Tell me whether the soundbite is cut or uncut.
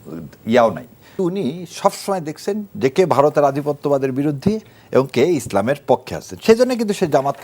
cut